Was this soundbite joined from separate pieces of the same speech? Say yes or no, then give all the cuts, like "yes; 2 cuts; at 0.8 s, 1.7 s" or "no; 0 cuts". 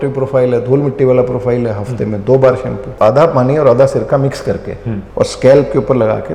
yes; 2 cuts; at 2.9 s, 4.9 s